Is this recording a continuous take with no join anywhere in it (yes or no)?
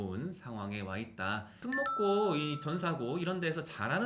no